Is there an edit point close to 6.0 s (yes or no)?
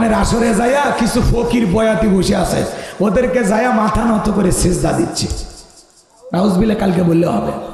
no